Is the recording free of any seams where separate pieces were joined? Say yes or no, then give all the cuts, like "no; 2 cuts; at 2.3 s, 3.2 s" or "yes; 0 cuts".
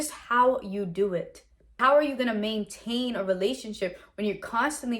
no; 1 cut; at 1.8 s